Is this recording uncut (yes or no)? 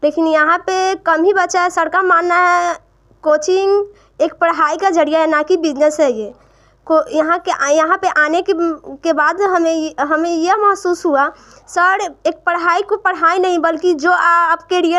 yes